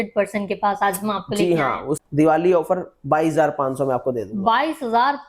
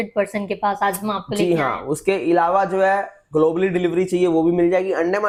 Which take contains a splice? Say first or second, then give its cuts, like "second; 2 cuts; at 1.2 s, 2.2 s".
first; 1 cut; at 1.9 s